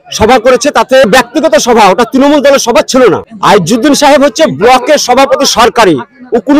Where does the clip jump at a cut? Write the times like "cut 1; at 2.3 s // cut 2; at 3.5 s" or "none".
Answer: cut 1; at 1.1 s // cut 2; at 3.3 s